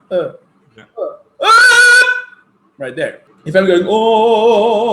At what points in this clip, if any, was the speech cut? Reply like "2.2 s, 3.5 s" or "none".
3.3 s

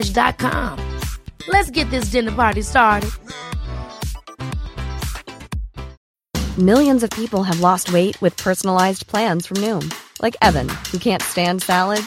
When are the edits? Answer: 6.0 s

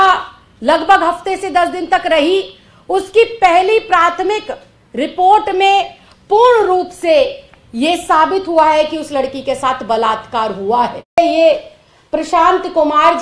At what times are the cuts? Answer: 11.2 s

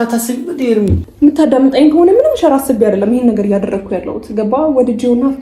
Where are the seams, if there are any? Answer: 1.0 s

